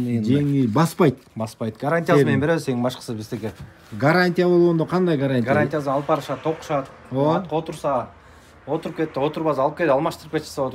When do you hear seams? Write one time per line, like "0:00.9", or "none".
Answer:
none